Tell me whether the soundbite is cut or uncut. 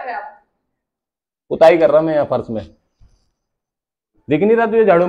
uncut